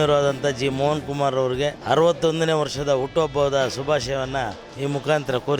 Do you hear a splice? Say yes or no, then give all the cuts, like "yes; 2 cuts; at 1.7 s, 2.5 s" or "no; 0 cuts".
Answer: yes; 2 cuts; at 1.8 s, 4.6 s